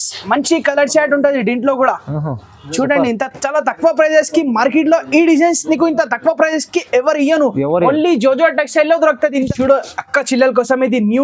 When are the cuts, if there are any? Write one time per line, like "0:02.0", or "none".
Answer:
0:09.5